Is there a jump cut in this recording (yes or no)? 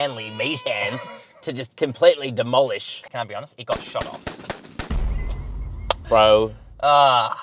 no